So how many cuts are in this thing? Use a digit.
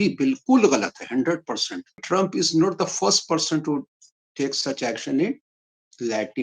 1